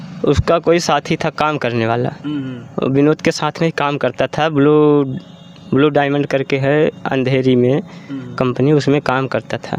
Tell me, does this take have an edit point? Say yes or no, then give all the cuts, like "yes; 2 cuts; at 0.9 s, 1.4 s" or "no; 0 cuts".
no; 0 cuts